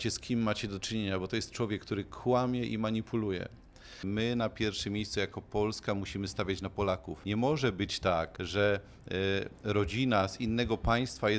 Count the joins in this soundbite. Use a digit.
3